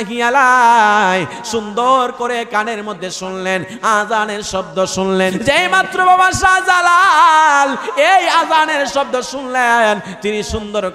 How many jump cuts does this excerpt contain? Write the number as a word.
one